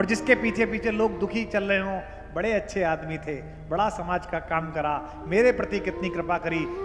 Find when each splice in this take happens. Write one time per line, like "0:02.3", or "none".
none